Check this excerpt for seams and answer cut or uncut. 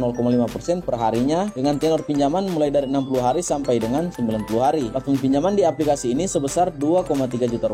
cut